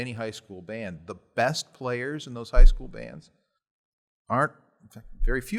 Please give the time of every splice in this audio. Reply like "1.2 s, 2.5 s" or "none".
none